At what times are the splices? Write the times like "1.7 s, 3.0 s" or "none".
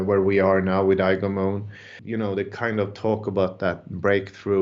1.9 s